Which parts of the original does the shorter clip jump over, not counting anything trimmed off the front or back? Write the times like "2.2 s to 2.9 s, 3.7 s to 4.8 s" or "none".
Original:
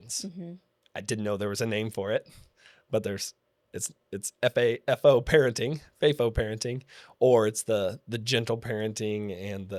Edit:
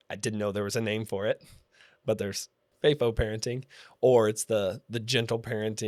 3.5 s to 5.9 s